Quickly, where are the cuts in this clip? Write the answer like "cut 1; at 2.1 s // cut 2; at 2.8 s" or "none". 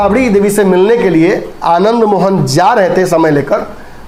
none